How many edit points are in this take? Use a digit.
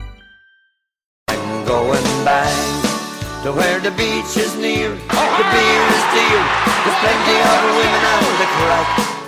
1